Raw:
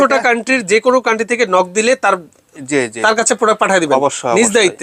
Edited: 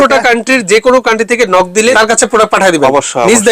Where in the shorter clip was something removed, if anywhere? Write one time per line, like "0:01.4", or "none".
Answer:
0:01.9